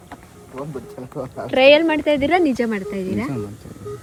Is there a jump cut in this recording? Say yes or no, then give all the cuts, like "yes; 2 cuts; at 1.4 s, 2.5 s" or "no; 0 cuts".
no; 0 cuts